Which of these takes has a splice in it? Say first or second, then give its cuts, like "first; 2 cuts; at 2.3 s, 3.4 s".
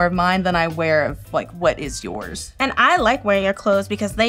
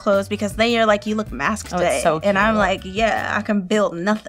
first; 1 cut; at 2.4 s